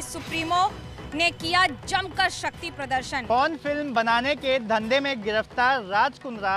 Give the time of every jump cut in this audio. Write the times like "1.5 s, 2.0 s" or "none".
3.2 s